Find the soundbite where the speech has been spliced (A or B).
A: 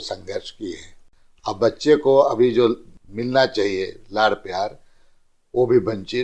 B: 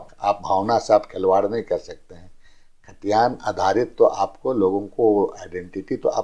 A